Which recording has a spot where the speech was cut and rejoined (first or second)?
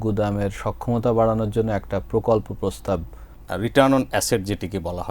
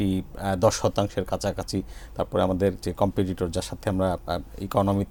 first